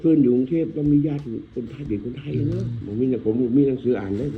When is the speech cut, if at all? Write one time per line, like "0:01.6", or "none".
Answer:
0:02.8

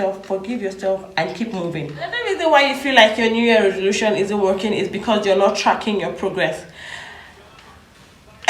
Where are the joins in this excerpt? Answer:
none

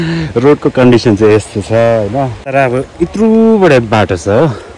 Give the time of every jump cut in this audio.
0:02.4

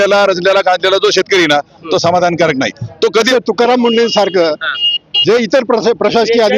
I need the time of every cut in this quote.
0:03.3

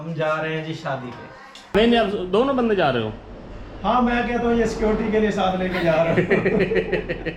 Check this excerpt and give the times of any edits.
0:01.7

